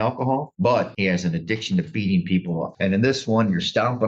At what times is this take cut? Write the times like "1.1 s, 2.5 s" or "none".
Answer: 2.7 s